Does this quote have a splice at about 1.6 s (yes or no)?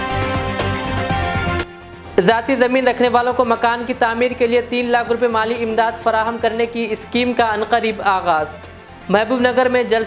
yes